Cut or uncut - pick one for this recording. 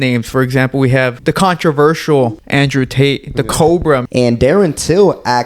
cut